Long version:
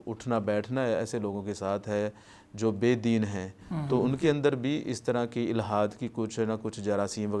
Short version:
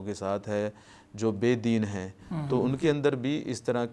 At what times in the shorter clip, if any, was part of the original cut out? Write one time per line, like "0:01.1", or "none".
none

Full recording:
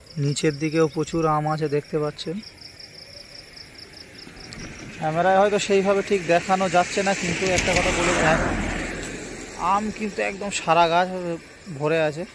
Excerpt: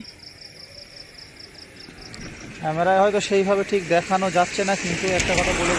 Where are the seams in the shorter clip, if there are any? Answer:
none

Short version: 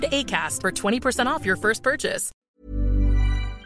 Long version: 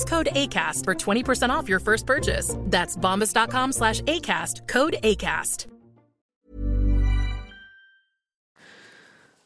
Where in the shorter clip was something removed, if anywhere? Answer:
0:02.3

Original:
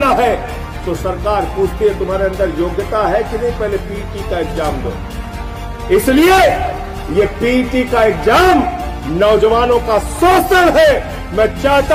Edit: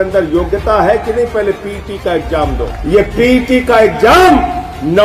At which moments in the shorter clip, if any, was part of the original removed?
0:02.7

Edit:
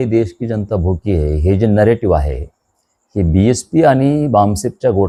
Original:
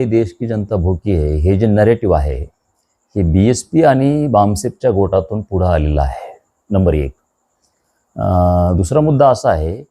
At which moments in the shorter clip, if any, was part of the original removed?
none

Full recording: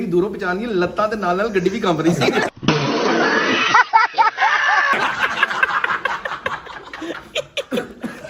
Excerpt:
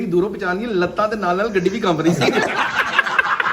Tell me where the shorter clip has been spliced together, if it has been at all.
0:02.6

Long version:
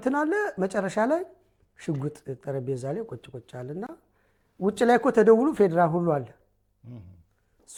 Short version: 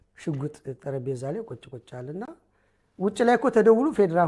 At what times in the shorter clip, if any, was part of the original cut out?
none

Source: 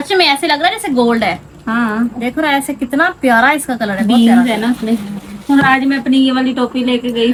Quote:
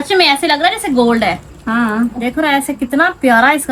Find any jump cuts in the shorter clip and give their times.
none

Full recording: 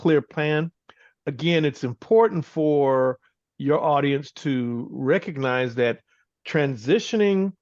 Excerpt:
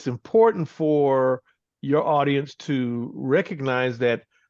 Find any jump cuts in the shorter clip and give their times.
none

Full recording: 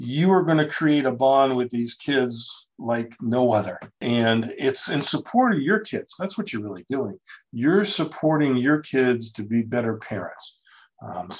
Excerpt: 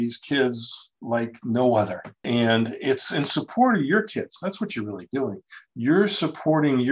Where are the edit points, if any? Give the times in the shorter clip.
none

